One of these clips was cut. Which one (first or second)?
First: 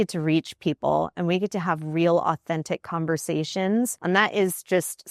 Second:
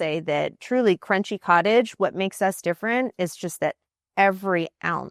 first